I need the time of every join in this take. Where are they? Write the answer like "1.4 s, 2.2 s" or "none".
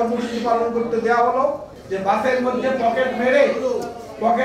1.7 s